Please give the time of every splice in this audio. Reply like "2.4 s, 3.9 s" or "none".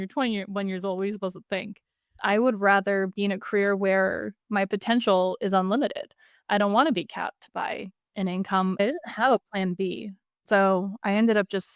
2.1 s, 8.8 s